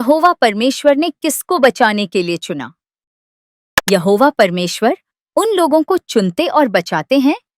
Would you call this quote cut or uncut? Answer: cut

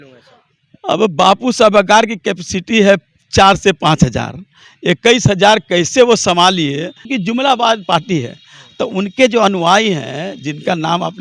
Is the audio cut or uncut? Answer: cut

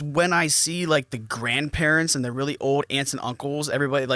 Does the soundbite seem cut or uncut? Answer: uncut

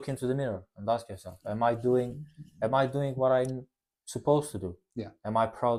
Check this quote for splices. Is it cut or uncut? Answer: uncut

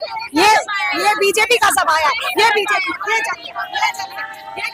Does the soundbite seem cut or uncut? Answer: uncut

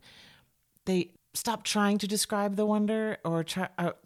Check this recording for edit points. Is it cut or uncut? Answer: cut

